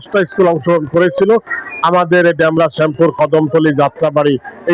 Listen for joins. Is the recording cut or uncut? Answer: uncut